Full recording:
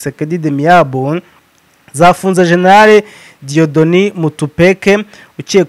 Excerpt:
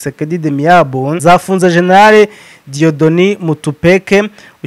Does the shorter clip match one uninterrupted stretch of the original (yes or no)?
no